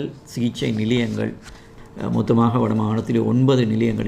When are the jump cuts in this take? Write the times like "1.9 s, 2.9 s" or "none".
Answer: 1.7 s